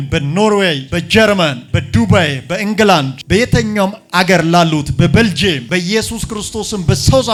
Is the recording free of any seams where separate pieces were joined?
yes; 0 cuts

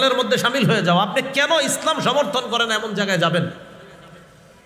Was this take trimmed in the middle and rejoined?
no; 0 cuts

